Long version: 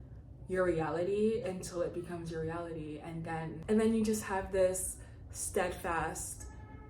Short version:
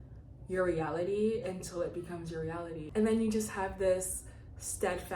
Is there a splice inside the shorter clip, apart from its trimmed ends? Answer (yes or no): yes